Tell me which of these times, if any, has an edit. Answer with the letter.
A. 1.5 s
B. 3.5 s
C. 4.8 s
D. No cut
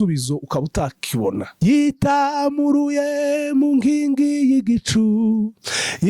A